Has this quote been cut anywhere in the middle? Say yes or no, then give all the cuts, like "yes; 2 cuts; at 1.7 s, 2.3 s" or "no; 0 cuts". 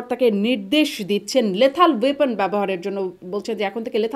no; 0 cuts